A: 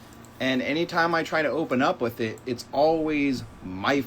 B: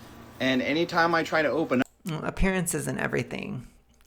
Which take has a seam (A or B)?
A